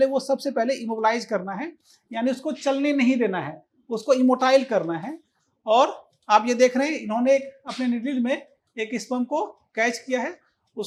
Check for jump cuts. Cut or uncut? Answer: uncut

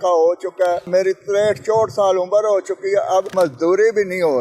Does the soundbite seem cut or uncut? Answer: cut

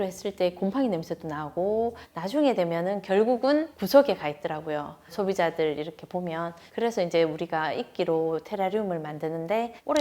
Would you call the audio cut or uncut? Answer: cut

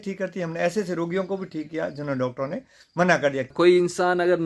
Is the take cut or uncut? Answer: cut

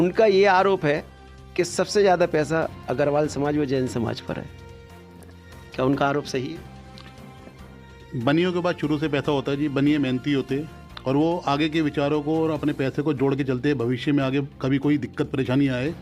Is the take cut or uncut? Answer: uncut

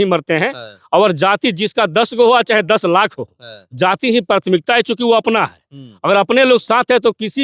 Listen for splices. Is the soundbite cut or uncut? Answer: uncut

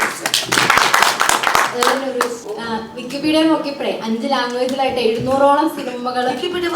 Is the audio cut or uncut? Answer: cut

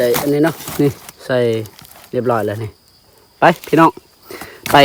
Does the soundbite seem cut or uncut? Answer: uncut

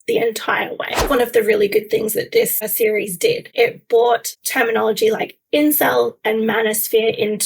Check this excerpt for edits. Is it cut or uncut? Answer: cut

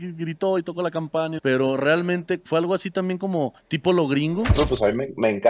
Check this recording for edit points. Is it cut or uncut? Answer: cut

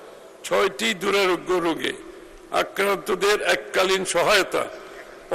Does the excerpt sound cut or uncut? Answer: uncut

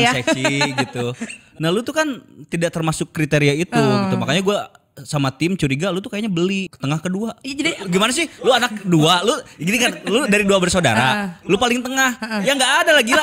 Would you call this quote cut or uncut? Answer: cut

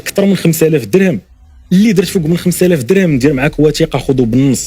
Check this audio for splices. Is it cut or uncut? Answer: uncut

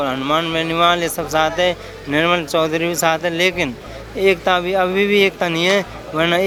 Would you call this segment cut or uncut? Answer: uncut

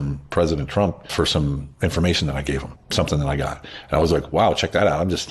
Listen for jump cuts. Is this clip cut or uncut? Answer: cut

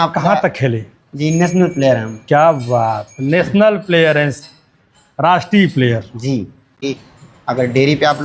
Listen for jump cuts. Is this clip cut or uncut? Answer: cut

